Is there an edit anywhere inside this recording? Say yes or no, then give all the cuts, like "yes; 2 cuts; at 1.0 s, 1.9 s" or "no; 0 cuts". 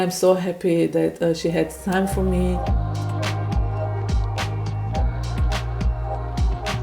no; 0 cuts